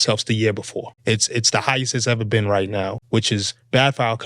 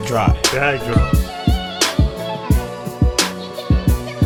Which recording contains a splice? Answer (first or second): first